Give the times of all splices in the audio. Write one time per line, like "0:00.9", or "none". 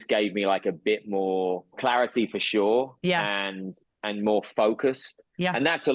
0:01.8